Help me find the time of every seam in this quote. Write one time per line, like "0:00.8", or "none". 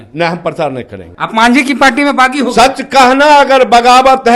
0:01.2